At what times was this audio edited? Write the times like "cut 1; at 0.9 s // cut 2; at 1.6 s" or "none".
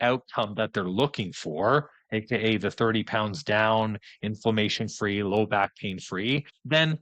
none